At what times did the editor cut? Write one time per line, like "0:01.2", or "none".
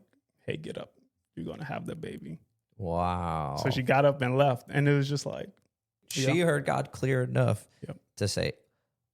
0:06.0

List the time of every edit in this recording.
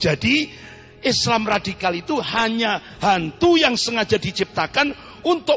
none

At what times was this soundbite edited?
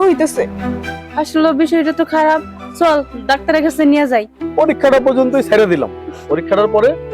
0:04.4

